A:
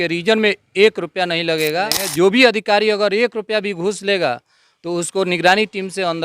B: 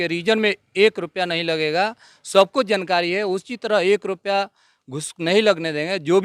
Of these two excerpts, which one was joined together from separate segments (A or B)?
A